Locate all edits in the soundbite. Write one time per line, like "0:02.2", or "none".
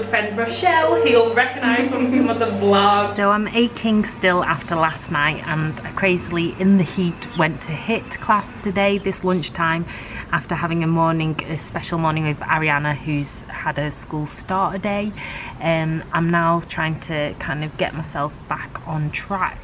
0:03.1